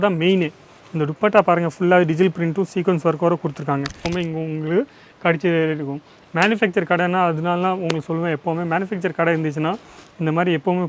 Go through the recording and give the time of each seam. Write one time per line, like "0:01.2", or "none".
0:04.0